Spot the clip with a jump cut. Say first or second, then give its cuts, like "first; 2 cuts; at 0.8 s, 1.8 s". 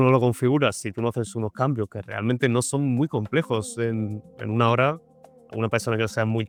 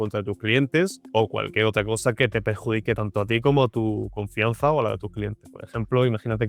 second; 2 cuts; at 1.0 s, 5.4 s